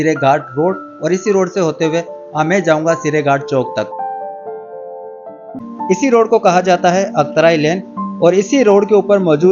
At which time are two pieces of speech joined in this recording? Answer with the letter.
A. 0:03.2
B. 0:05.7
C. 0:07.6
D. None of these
B